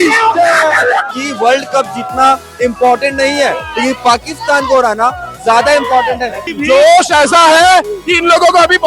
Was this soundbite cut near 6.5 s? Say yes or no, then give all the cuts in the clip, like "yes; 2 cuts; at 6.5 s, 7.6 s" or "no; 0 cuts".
yes; 2 cuts; at 1.1 s, 6.5 s